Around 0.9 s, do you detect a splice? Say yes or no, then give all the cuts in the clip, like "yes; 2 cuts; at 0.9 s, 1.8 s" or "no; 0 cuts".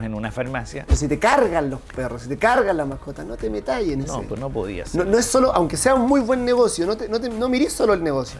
yes; 1 cut; at 0.9 s